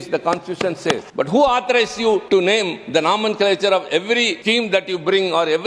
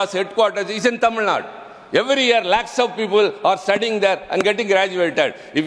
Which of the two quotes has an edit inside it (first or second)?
first